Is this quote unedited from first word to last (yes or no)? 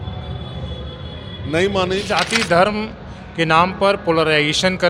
no